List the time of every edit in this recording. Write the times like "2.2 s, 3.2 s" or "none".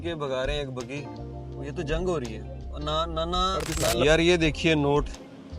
4.0 s

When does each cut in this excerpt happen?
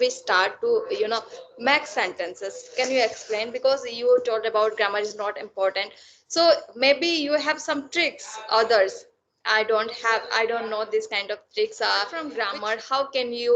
12.3 s

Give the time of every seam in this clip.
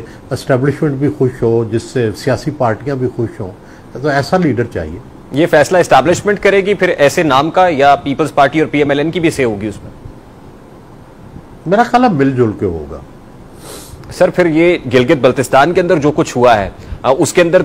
none

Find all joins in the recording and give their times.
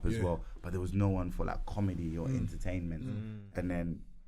3.2 s

